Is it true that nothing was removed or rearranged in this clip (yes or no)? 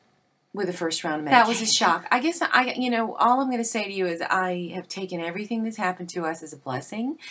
no